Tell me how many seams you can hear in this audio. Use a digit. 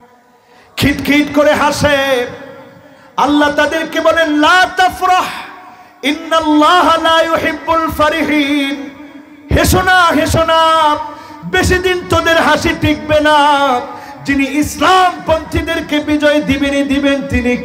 0